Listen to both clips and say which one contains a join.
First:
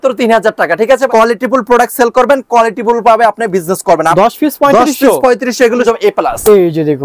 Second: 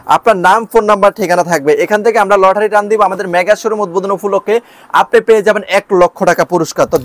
first; 3 cuts; at 1.0 s, 4.1 s, 5.8 s

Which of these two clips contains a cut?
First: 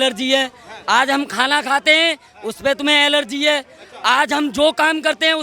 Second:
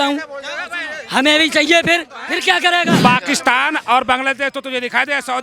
second; 1 cut; at 3.0 s

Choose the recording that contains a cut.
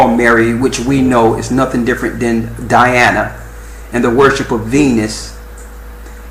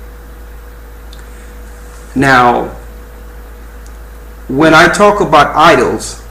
second; 1 cut; at 4.2 s

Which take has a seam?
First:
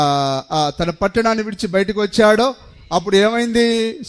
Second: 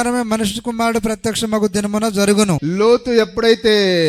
second; 1 cut; at 2.6 s

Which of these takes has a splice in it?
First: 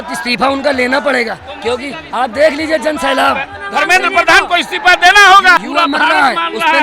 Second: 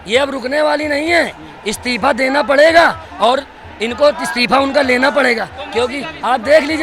first; 2 cuts; at 3.6 s, 5.6 s

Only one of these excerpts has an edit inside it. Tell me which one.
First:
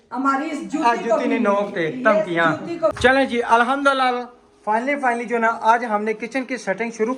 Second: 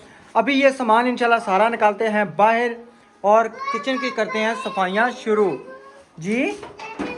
first; 1 cut; at 3.0 s

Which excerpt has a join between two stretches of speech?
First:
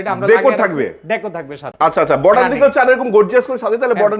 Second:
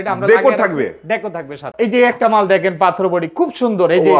second; 1 cut; at 1.7 s

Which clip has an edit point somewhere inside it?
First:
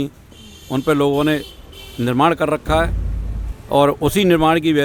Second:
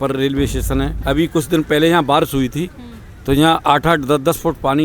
second; 1 cut; at 1.0 s

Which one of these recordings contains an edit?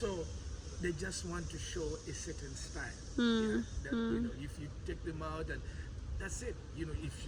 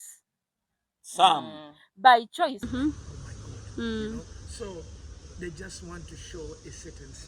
second; 1 cut; at 2.6 s

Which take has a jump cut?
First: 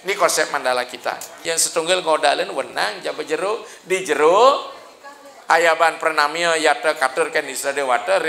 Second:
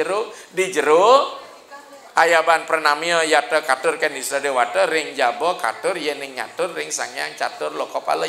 first; 1 cut; at 1.3 s

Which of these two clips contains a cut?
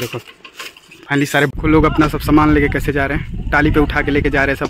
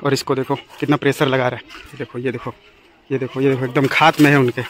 first; 1 cut; at 1.5 s

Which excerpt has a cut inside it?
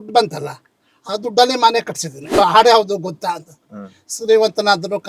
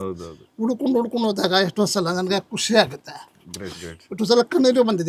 first; 1 cut; at 2.4 s

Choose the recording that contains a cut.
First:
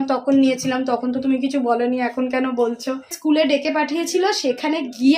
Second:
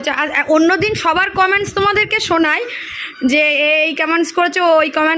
first; 1 cut; at 3.1 s

